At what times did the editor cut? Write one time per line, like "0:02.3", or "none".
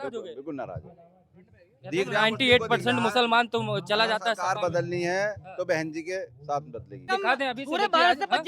0:07.1